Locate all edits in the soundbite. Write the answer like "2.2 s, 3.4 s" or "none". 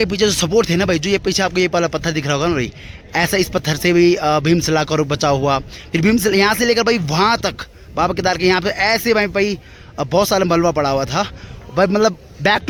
none